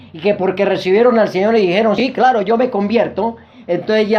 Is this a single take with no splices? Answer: yes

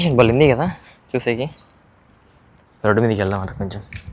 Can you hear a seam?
no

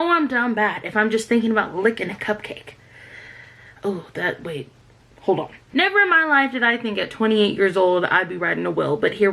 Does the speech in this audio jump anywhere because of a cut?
yes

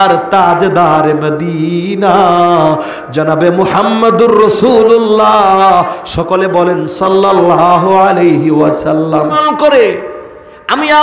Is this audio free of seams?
no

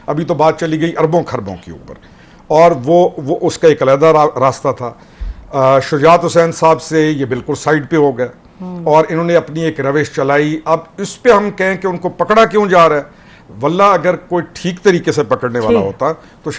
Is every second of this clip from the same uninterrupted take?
yes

